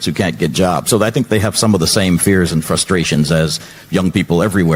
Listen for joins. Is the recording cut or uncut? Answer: uncut